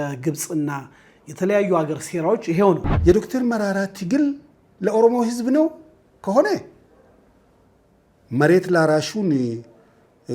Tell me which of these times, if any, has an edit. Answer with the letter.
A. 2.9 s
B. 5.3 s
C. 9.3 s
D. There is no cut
A